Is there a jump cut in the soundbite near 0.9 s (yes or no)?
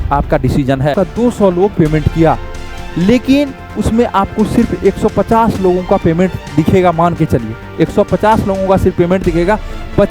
yes